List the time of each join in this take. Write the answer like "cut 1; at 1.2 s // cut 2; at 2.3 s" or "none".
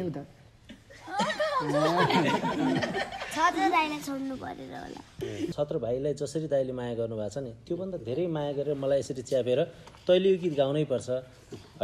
cut 1; at 5.5 s